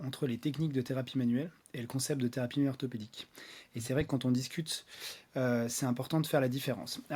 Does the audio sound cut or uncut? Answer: uncut